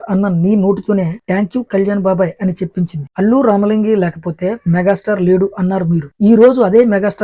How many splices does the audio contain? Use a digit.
1